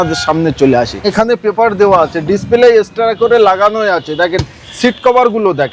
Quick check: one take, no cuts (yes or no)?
no